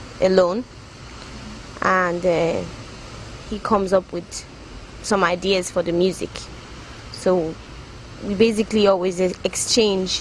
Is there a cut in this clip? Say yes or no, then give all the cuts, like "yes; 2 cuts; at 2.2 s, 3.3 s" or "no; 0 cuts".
yes; 1 cut; at 4.0 s